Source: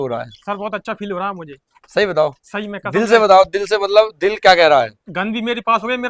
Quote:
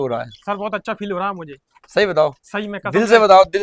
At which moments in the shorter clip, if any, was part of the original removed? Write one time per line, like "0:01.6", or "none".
none

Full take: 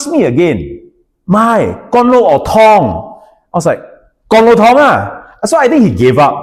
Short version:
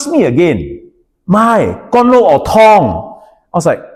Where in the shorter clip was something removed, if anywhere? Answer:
none

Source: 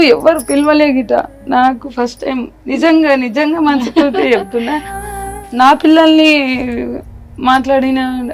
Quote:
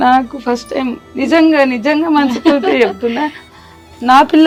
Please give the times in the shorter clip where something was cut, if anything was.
none

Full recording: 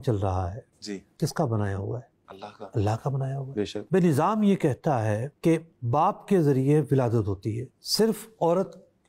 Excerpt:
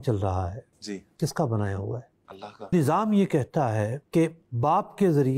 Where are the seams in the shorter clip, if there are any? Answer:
0:02.7

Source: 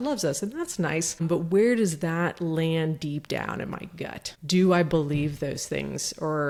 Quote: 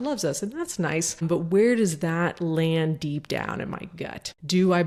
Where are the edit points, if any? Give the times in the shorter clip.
none

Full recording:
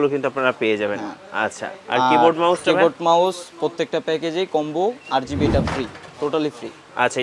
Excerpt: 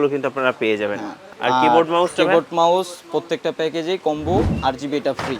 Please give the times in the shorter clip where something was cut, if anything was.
0:01.2

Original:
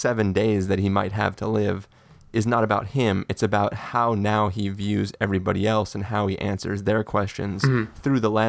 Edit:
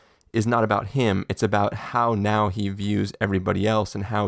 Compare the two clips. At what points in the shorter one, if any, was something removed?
none

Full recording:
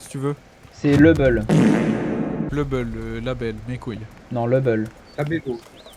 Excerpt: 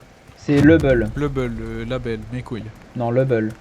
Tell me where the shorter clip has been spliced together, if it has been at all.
0:01.1

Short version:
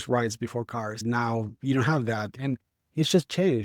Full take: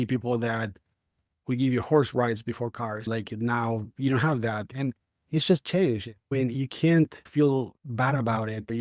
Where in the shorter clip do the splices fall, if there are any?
0:00.9

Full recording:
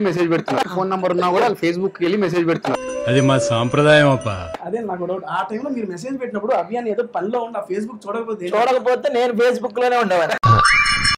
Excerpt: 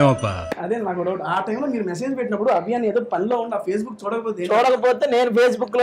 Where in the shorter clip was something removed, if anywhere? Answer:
none

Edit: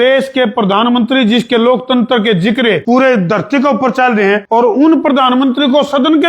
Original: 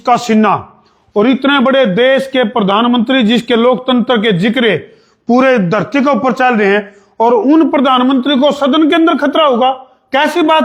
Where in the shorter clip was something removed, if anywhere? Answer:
0:02.8
0:04.4

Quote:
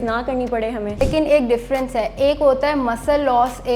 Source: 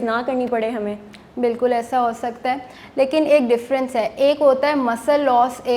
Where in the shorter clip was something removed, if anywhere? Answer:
0:01.0

